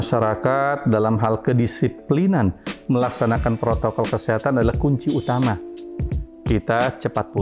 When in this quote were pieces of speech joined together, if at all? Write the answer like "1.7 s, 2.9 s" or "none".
none

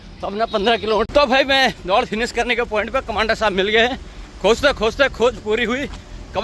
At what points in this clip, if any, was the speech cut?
1.1 s

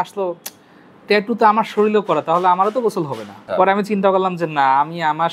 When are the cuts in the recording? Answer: 3.5 s

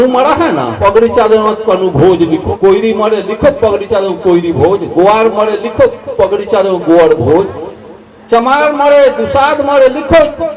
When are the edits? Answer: 0.8 s, 2.5 s

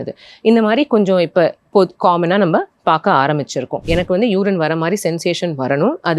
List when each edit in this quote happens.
3.8 s

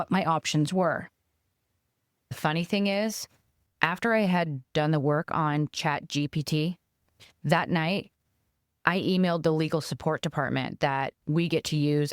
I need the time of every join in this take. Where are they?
2.4 s

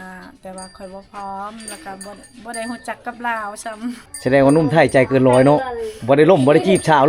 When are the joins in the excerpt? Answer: 4.1 s

